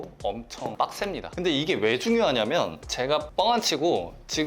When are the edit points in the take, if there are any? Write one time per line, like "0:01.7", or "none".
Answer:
0:01.3
0:02.8